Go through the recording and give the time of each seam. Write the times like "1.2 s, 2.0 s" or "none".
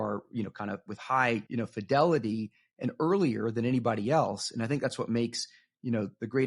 1.5 s

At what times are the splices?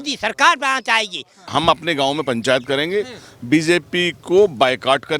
1.3 s

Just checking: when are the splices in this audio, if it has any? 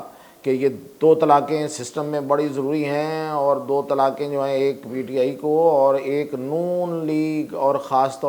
none

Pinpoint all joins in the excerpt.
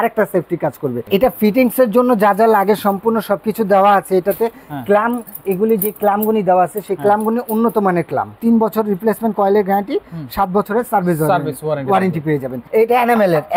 1.1 s, 8.4 s, 12.6 s

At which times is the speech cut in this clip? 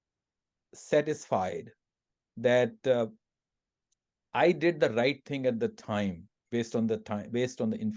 none

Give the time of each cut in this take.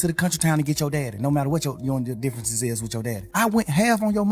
3.2 s

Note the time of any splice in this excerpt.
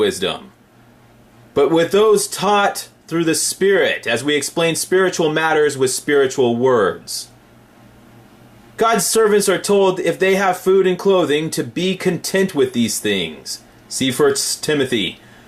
5.9 s

